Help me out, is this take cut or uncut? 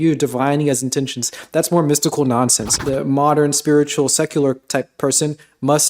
cut